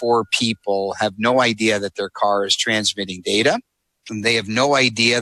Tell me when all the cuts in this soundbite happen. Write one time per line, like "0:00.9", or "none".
0:04.1